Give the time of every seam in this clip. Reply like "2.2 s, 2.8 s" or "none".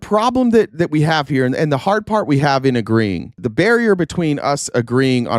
3.4 s